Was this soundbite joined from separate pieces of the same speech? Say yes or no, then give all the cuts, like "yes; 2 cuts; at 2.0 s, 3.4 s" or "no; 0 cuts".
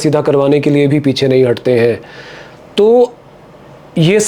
no; 0 cuts